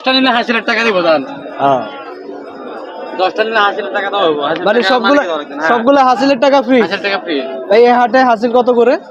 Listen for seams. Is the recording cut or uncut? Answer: uncut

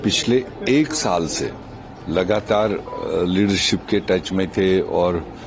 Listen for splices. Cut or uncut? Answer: uncut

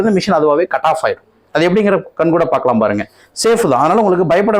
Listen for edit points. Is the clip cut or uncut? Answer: uncut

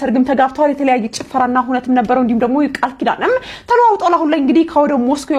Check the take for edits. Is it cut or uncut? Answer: uncut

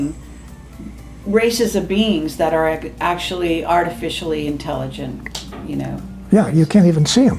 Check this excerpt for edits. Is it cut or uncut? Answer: uncut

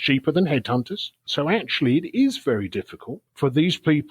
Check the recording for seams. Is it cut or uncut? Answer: cut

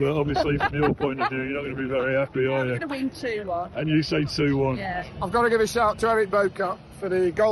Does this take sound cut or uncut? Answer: cut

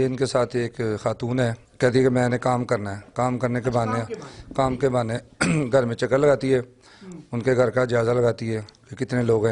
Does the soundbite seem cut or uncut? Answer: cut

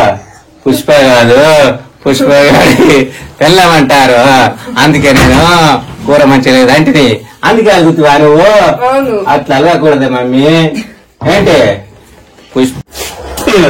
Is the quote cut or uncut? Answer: cut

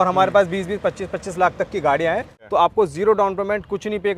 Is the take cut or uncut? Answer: cut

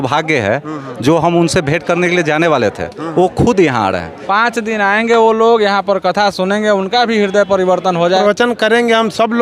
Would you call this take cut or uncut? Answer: cut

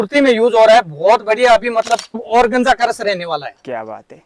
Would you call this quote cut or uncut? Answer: cut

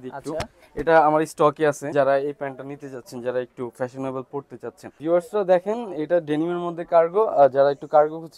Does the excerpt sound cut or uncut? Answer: cut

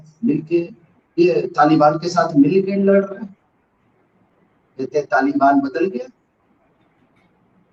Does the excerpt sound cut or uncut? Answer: uncut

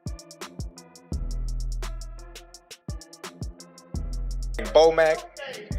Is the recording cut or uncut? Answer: cut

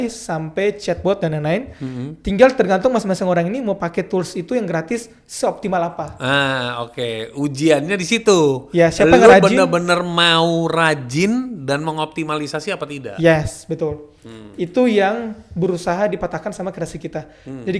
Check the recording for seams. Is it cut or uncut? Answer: uncut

